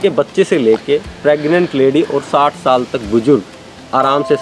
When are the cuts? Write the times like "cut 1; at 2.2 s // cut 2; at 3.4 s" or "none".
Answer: none